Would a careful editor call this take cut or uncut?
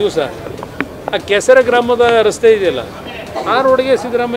uncut